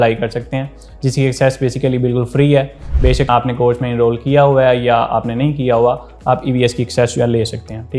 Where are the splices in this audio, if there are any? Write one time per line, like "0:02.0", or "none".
none